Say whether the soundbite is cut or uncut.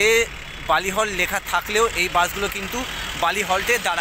uncut